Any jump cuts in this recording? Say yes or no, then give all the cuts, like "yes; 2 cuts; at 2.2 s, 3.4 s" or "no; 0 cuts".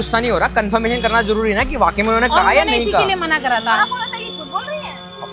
no; 0 cuts